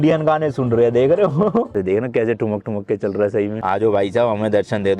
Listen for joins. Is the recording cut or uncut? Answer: cut